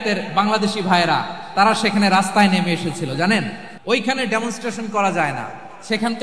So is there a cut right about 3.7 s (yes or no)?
yes